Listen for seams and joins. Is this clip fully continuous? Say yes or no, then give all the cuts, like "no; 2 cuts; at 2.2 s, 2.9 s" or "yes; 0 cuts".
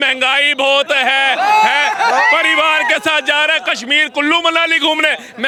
yes; 0 cuts